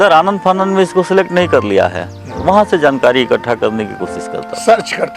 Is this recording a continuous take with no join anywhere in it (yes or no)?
no